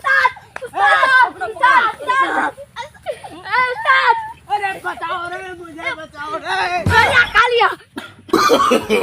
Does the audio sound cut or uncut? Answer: cut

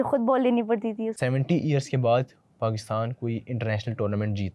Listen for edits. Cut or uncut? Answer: cut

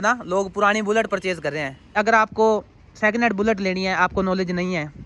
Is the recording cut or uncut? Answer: cut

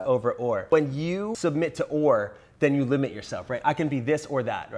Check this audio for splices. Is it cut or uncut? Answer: cut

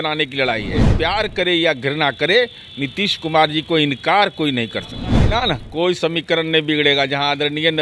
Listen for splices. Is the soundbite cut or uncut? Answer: cut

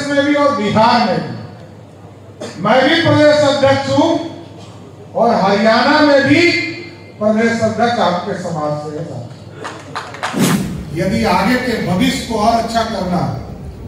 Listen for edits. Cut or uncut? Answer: cut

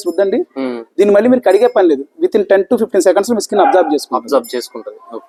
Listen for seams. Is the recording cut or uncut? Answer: uncut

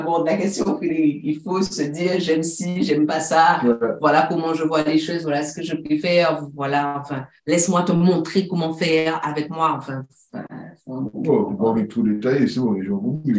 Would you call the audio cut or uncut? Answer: uncut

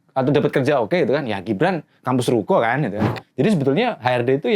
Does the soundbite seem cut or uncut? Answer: cut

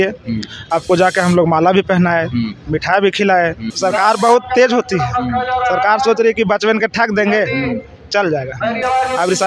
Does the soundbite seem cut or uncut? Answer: cut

